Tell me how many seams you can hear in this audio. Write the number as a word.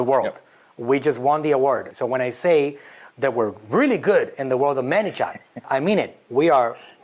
two